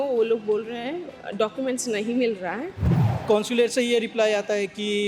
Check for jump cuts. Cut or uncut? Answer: cut